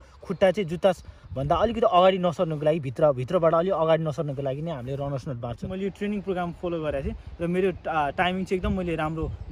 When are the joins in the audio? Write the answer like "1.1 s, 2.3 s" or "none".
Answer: 5.7 s